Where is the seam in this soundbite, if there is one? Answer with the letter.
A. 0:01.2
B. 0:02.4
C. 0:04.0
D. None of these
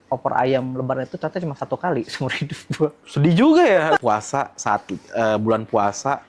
C